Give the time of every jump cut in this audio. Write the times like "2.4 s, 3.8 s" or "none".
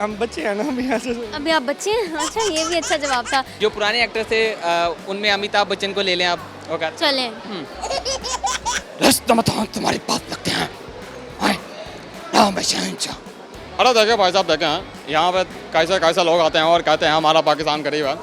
3.5 s